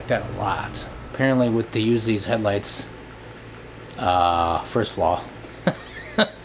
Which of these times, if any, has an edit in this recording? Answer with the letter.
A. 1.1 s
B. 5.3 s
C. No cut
A